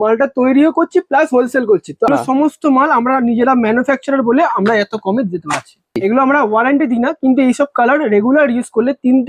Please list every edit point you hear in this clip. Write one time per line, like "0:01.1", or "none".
0:02.1
0:06.0